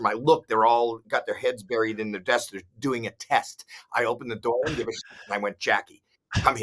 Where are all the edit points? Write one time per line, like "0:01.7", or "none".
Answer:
none